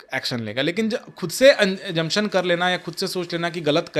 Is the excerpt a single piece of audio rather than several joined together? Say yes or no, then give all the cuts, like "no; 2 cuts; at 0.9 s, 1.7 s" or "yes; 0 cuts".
yes; 0 cuts